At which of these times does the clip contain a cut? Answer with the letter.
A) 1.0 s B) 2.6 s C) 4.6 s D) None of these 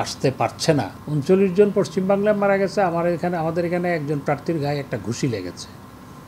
A